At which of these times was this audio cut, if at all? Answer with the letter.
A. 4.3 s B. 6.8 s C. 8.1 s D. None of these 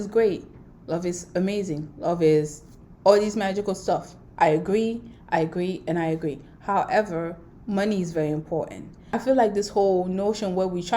D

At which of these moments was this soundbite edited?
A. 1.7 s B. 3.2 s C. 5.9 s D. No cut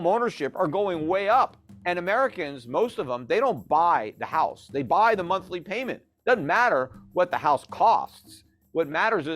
A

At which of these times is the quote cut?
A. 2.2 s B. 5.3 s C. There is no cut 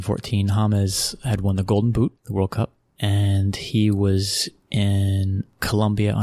A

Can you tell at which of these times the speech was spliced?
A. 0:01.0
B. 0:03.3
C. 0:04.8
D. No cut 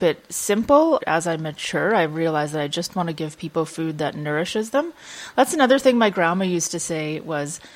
A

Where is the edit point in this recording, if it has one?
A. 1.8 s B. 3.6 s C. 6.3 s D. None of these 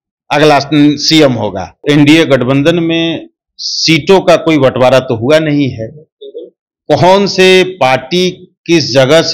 A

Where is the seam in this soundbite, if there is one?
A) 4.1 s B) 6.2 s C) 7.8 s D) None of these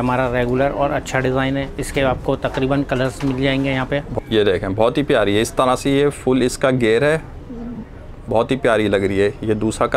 A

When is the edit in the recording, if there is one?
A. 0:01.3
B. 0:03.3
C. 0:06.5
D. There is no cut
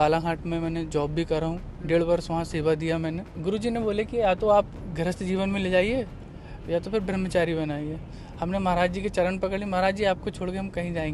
B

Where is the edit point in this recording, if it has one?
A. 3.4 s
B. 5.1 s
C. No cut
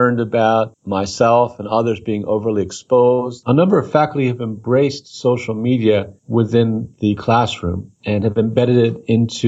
A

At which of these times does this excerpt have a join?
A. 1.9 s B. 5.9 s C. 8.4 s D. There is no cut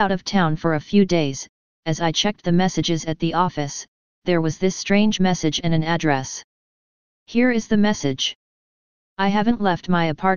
D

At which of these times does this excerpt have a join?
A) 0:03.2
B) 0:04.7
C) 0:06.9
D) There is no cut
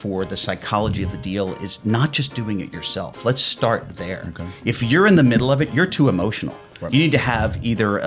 D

